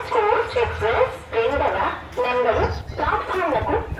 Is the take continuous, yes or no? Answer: yes